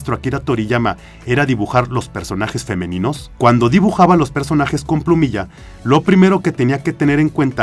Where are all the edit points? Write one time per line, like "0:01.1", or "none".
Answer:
0:03.3